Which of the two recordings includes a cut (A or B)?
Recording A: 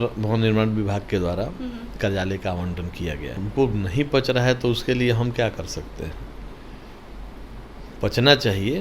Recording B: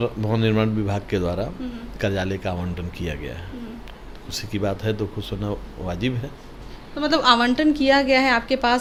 A